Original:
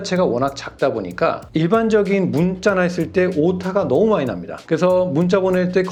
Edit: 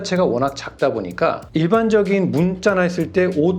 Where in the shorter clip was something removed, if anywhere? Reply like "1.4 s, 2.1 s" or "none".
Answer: none